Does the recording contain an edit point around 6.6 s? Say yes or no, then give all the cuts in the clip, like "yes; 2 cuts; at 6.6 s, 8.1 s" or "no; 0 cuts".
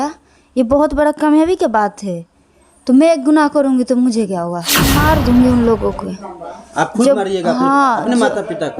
no; 1 cut; at 5.0 s